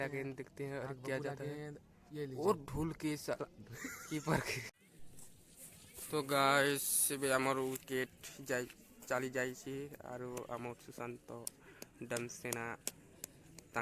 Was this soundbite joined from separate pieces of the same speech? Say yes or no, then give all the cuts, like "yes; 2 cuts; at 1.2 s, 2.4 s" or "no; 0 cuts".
yes; 1 cut; at 4.6 s